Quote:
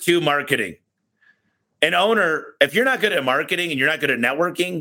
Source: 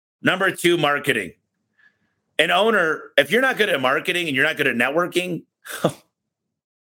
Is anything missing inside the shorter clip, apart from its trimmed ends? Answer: no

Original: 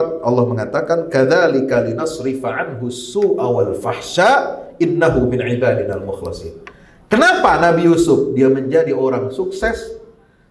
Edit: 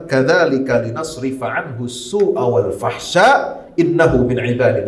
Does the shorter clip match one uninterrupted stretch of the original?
yes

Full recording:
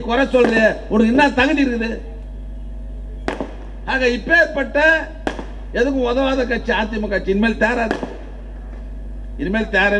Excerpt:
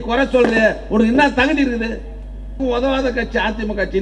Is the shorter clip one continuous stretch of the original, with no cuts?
no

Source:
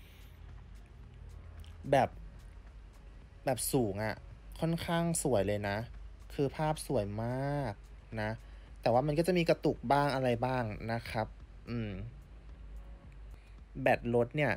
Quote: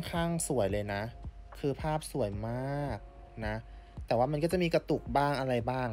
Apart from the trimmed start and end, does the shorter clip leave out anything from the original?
no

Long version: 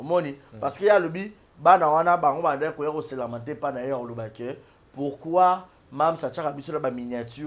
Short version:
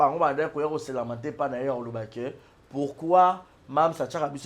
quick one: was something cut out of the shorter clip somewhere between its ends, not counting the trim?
no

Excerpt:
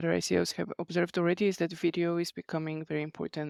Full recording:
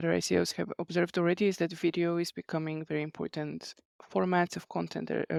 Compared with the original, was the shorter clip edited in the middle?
no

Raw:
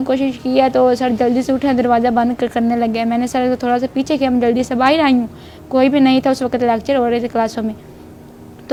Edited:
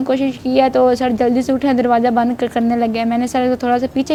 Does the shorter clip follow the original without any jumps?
yes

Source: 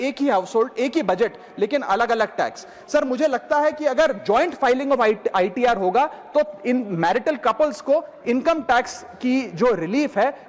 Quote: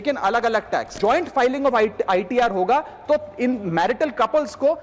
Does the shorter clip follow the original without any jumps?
no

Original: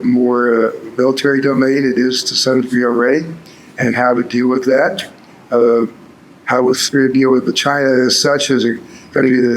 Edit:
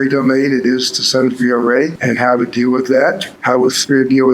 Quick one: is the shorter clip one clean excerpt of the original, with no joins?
no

